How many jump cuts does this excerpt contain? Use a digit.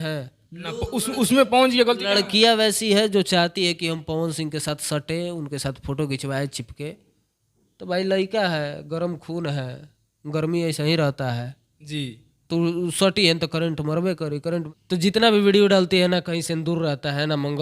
1